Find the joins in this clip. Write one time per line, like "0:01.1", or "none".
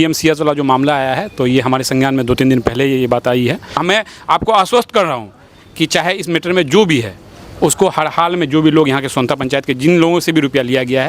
0:03.8